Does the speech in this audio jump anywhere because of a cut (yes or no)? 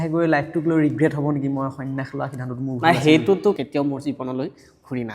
yes